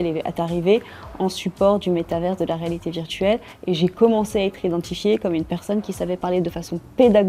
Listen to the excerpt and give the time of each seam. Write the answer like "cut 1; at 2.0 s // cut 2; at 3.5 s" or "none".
none